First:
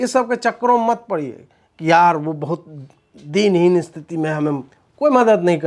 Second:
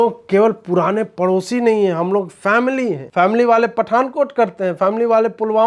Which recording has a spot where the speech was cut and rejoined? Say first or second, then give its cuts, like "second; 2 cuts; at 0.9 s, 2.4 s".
second; 1 cut; at 3.0 s